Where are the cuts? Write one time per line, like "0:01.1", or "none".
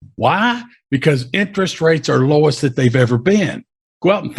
none